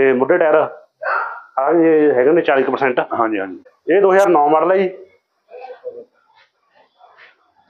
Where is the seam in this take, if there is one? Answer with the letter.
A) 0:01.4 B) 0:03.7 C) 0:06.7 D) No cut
B